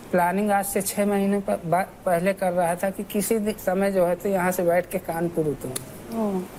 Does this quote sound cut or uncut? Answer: uncut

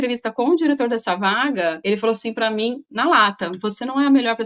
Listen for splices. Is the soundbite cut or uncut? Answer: uncut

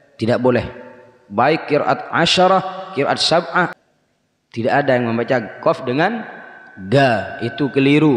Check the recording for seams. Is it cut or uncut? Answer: cut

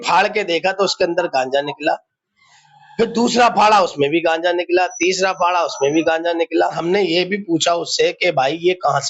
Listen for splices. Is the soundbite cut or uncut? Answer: cut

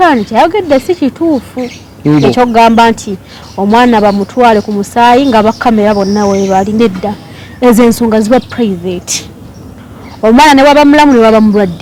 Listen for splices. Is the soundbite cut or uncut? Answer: uncut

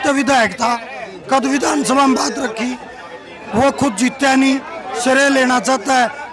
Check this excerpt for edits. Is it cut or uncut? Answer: uncut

